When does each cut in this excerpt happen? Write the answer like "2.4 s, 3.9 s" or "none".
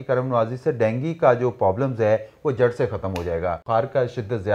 3.6 s